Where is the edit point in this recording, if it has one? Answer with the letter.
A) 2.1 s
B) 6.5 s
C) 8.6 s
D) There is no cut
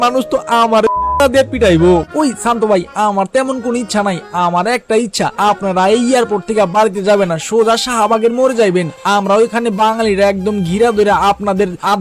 A